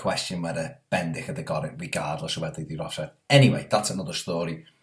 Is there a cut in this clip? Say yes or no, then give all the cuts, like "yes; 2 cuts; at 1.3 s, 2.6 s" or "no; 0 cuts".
no; 0 cuts